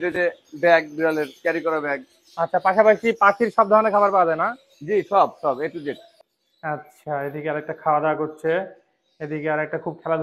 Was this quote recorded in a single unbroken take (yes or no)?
no